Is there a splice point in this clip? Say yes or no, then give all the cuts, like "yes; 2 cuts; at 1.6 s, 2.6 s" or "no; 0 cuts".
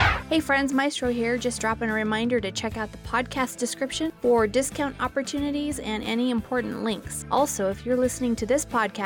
no; 0 cuts